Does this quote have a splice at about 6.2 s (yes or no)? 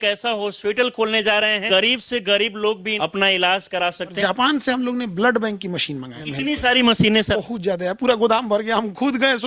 yes